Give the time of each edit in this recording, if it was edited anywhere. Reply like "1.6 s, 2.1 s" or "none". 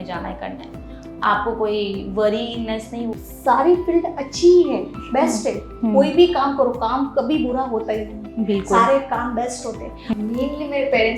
3.1 s, 10.2 s